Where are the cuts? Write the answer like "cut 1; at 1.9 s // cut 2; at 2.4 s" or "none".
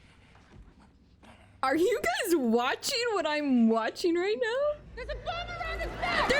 cut 1; at 5.0 s